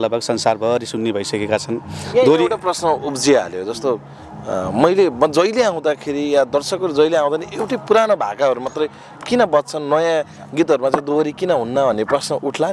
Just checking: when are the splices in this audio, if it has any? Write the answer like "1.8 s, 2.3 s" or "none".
none